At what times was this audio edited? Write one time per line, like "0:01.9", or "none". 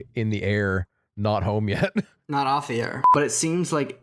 0:03.1